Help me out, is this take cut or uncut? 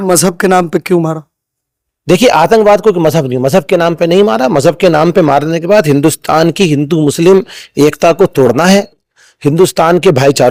uncut